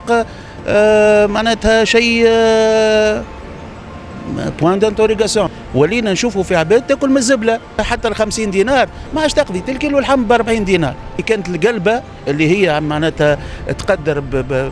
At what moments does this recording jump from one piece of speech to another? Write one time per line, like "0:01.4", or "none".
0:05.5
0:07.8
0:11.2

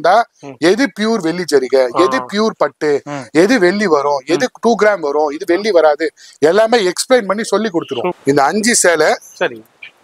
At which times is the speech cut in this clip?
0:08.2

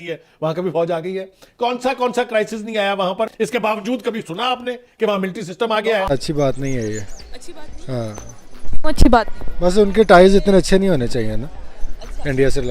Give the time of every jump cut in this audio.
0:03.3
0:06.1

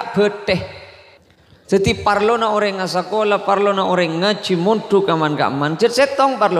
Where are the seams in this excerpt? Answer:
0:01.2

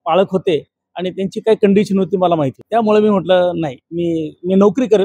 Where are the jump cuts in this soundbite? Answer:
0:02.6

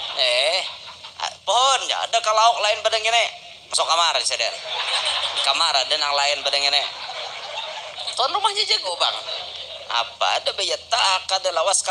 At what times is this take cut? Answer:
0:08.8

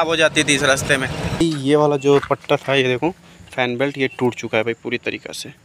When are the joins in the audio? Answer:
0:01.4

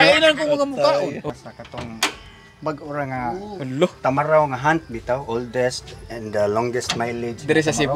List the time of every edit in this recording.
0:01.2

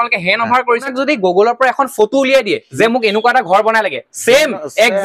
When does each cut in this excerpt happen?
0:00.9

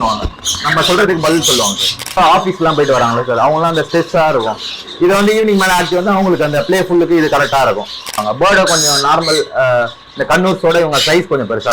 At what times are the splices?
0:02.2
0:08.2

